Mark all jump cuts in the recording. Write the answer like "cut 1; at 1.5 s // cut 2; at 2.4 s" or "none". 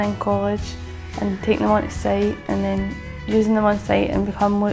none